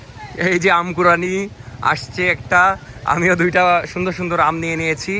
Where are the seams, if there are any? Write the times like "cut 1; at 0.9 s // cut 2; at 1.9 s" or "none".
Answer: none